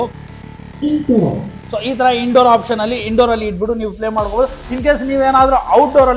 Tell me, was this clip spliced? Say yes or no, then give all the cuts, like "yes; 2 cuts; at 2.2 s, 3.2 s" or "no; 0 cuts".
no; 0 cuts